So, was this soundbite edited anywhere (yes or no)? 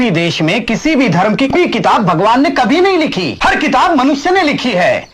yes